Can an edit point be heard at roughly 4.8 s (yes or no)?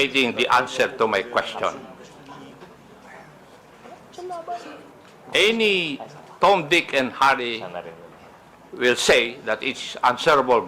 no